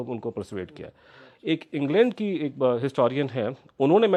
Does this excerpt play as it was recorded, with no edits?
yes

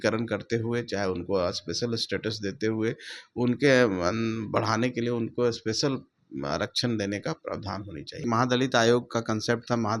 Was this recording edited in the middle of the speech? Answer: yes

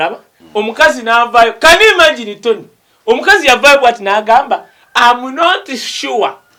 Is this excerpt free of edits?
yes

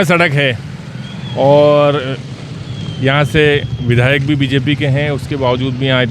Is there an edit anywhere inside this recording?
no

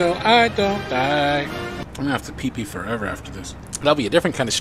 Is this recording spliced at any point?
yes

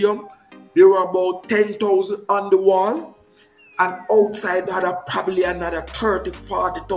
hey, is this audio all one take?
yes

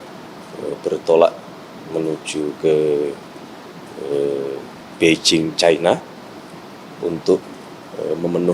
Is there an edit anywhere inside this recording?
yes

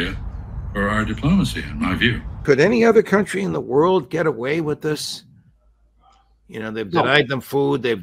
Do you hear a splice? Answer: no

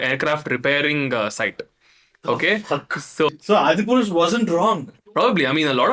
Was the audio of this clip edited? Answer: yes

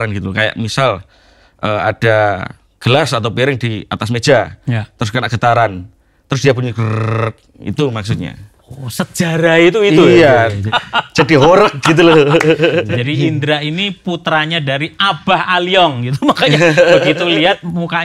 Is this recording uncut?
no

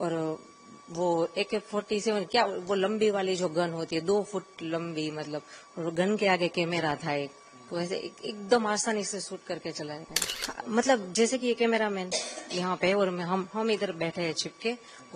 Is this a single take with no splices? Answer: no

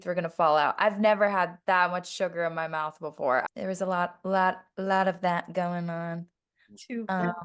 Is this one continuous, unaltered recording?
yes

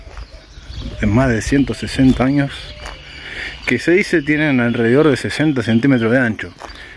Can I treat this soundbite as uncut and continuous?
yes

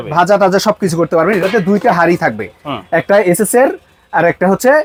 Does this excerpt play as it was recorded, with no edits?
yes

